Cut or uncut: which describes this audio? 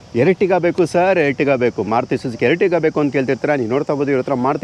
uncut